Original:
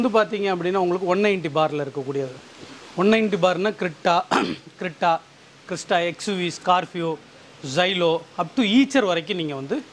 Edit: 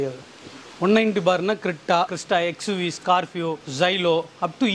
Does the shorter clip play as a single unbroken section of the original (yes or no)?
no